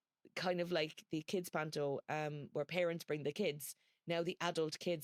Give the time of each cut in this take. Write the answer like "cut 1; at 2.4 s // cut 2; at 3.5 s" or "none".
none